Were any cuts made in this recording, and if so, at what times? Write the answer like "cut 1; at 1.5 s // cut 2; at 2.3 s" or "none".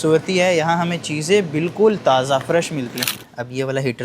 cut 1; at 3.1 s